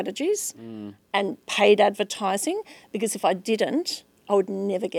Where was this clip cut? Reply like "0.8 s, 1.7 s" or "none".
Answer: none